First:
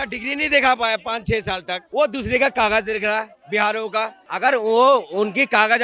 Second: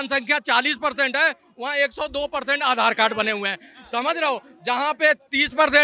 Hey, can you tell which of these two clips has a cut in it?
first; 2 cuts; at 1.8 s, 4.2 s

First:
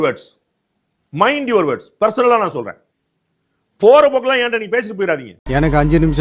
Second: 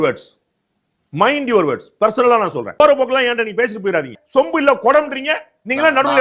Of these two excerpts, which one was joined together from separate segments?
second; 2 cuts; at 2.8 s, 4.2 s

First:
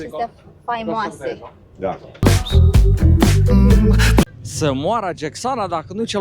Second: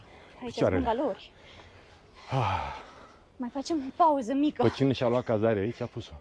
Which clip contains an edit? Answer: first; 2 cuts; at 2.2 s, 4.2 s

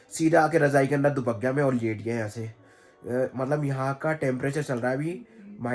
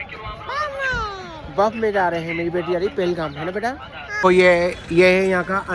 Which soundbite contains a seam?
second; 1 cut; at 4.1 s

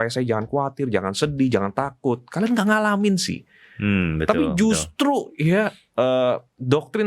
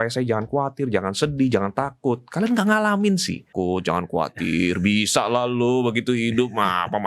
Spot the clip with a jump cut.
second; 1 cut; at 3.5 s

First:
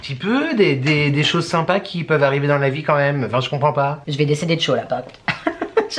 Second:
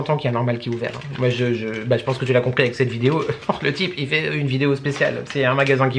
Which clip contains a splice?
first; 1 cut; at 4.0 s

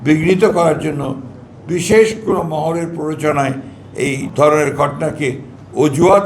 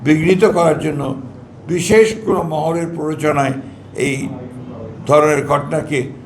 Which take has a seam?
first; 1 cut; at 4.3 s

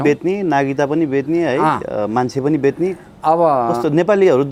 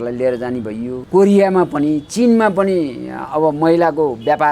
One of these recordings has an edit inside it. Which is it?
second; 1 cut; at 1.0 s

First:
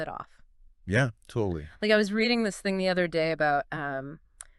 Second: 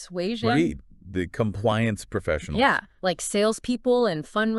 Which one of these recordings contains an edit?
second; 1 cut; at 2.9 s

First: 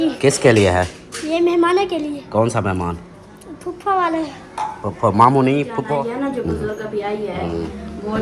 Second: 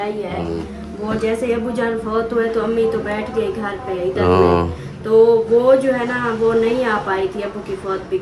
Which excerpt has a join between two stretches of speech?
first; 1 cut; at 5.9 s

